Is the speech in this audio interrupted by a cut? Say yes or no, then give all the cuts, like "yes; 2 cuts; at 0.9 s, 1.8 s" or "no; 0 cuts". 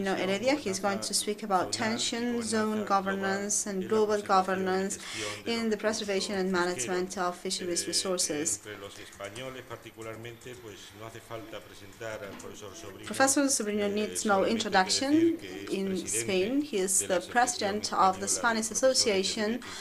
no; 0 cuts